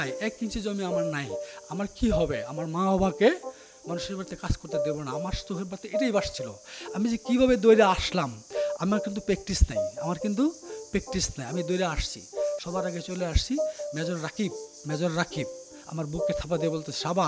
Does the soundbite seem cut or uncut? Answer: uncut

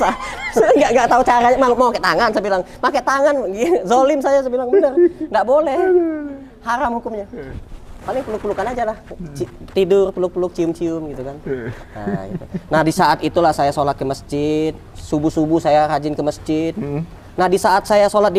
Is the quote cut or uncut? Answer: uncut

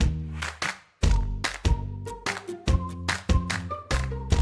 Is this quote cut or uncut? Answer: uncut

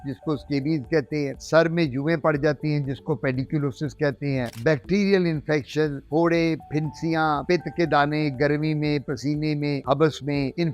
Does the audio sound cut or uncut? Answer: uncut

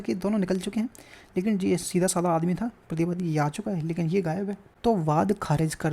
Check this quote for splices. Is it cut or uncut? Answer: cut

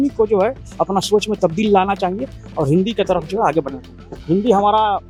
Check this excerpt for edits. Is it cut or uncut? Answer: uncut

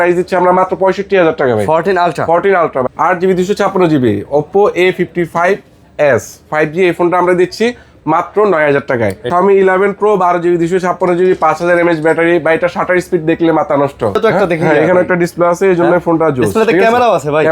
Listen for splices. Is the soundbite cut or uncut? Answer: cut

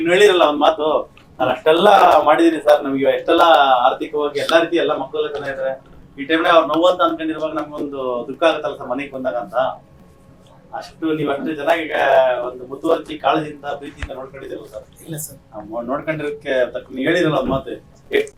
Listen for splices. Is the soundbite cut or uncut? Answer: uncut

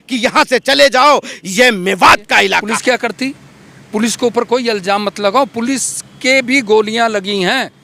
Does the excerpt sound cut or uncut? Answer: cut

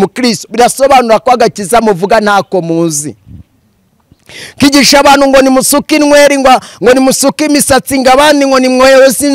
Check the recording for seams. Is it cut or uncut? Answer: uncut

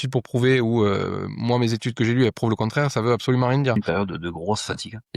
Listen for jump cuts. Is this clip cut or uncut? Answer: cut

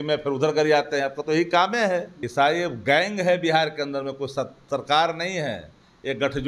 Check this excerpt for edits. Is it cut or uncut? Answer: cut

